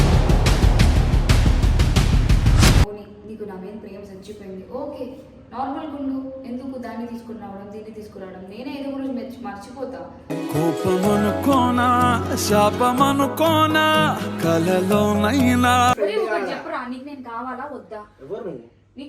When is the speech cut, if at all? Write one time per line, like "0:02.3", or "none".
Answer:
0:02.9
0:16.0